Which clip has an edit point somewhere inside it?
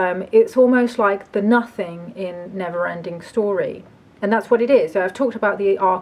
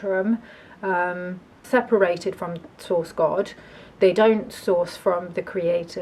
second; 1 cut; at 1.6 s

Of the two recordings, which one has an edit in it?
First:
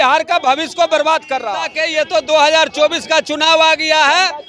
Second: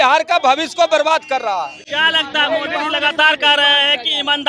first; 1 cut; at 1.8 s

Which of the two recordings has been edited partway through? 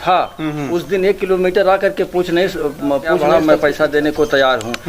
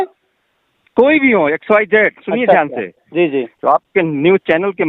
first; 1 cut; at 3.1 s

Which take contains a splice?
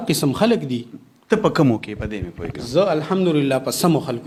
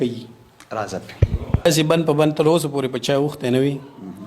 second; 1 cut; at 1.7 s

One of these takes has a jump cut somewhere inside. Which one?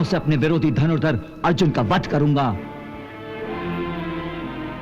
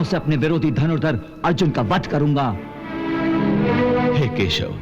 second; 1 cut; at 3.0 s

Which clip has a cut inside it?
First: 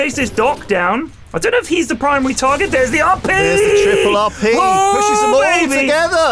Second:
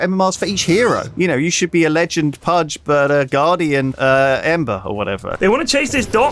second; 4 cuts; at 1.1 s, 2.7 s, 3.9 s, 4.8 s

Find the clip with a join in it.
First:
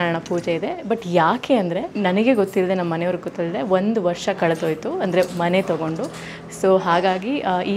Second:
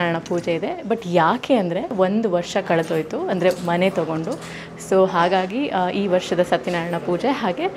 second; 1 cut; at 1.9 s

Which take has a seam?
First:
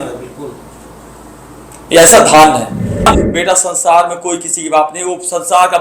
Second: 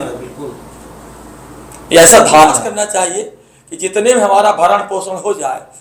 first; 1 cut; at 3.1 s

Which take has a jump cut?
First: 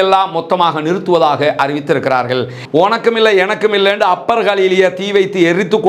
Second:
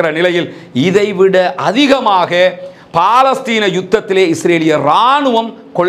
first; 1 cut; at 2.6 s

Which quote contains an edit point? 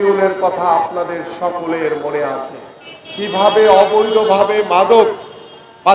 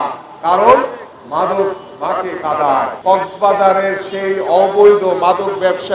second; 1 cut; at 2.9 s

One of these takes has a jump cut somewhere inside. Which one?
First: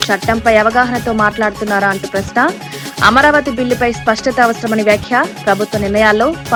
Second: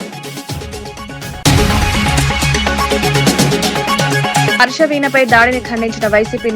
second; 1 cut; at 1.2 s

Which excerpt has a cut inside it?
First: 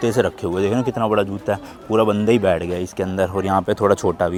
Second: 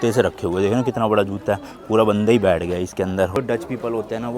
second; 1 cut; at 3.3 s

